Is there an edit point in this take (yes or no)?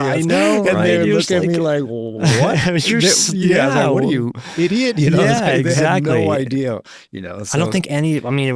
no